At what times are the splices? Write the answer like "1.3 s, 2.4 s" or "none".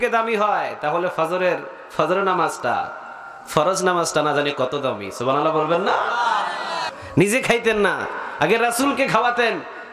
7.2 s